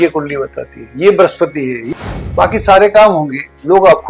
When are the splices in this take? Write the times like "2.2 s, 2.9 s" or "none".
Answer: 1.8 s